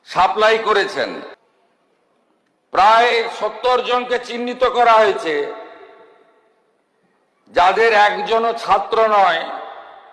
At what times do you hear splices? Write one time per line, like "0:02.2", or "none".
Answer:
0:01.3